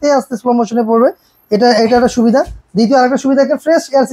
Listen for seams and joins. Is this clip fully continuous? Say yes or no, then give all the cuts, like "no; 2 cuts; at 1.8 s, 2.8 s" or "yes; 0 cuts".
yes; 0 cuts